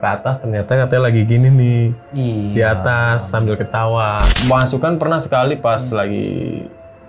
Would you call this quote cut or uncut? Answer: cut